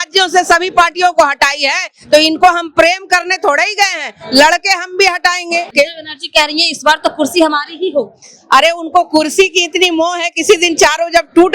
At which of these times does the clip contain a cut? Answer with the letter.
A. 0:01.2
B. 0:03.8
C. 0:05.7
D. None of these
C